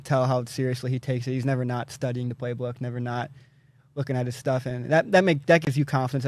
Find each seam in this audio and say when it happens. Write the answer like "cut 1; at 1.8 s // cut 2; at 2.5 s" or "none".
none